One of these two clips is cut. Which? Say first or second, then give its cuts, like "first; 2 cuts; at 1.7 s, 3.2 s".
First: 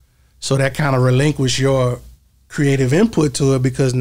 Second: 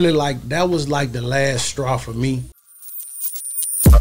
second; 1 cut; at 2.7 s